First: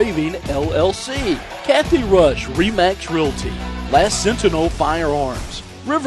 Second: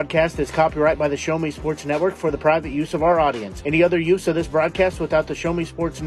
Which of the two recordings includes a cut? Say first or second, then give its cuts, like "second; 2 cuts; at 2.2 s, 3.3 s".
first; 1 cut; at 1.5 s